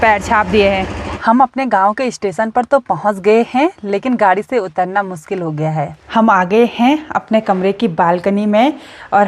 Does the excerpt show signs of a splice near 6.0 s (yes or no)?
yes